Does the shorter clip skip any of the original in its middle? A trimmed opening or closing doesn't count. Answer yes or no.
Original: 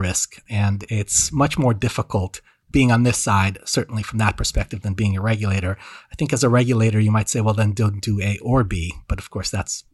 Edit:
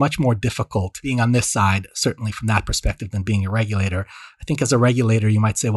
yes